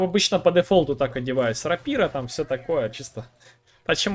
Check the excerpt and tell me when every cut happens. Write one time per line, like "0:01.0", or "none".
none

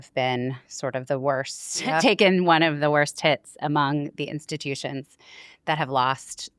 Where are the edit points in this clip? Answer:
none

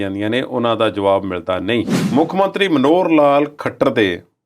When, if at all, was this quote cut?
0:02.0

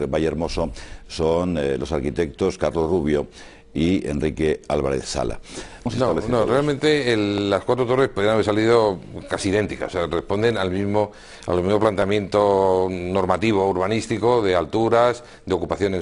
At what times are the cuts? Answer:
none

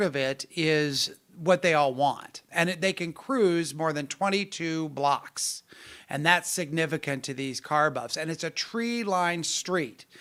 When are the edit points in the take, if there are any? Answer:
none

